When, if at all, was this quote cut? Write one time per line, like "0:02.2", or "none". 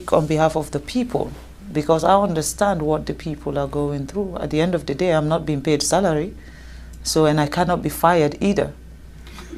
none